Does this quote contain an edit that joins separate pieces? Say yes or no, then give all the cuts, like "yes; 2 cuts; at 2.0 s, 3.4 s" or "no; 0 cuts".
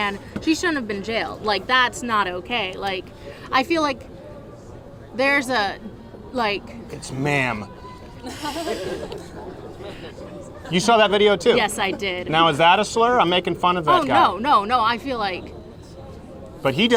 no; 0 cuts